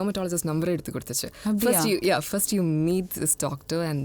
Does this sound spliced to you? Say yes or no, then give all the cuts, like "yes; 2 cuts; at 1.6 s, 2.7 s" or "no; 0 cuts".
no; 0 cuts